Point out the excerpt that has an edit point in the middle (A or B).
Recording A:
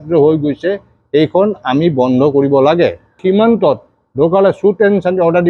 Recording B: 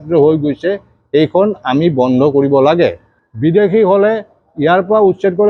A